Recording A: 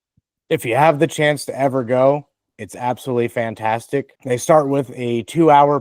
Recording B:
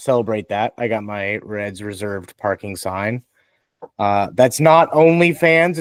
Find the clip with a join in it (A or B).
A